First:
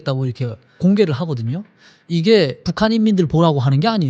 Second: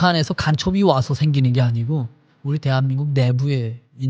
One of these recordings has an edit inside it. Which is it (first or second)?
first